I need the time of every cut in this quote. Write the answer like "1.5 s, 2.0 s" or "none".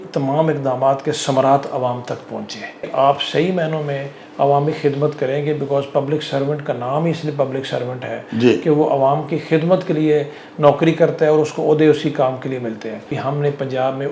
2.8 s, 13.1 s